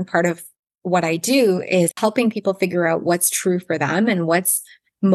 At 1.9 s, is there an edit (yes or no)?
yes